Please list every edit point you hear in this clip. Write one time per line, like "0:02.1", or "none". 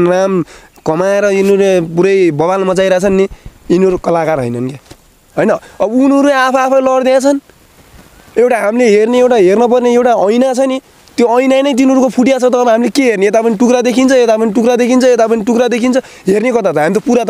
0:05.2